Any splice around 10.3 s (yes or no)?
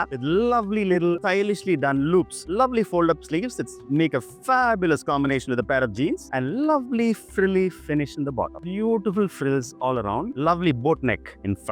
yes